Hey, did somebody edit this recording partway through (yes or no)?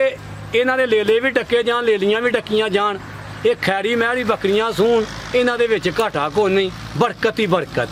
no